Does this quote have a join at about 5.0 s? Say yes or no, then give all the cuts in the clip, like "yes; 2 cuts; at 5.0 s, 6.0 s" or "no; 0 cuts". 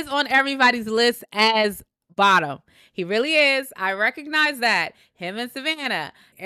no; 0 cuts